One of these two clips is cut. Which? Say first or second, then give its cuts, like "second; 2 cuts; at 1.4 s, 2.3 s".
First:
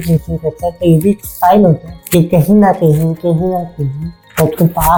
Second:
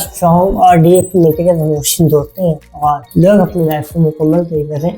second; 1 cut; at 2.6 s